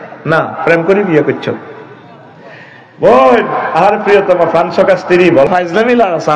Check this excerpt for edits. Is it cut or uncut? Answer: cut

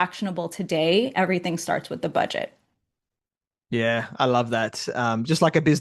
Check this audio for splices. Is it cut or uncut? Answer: uncut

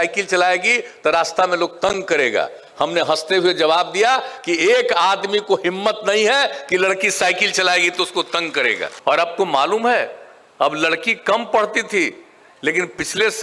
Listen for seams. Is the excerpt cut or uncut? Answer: cut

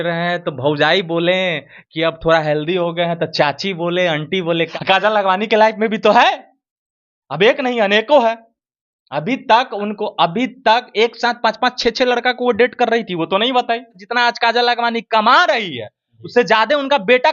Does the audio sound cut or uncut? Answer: cut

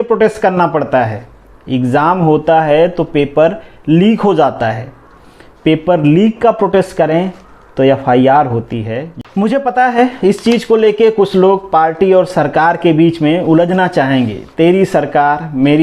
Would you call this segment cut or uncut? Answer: cut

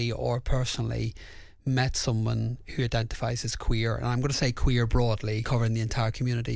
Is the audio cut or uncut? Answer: cut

